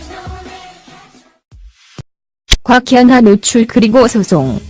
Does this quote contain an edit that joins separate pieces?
no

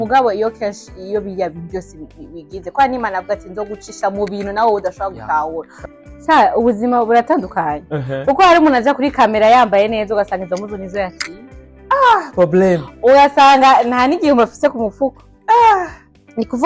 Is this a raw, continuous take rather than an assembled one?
no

